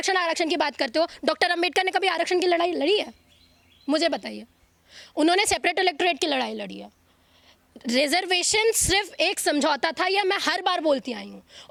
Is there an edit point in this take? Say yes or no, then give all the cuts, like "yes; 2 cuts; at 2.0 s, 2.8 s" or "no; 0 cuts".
no; 0 cuts